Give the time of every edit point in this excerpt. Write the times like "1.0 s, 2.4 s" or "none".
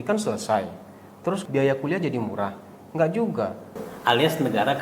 1.4 s, 3.8 s